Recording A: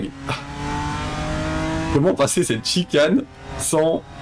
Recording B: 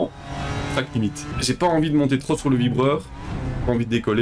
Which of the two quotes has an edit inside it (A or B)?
B